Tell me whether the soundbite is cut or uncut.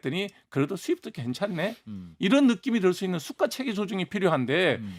uncut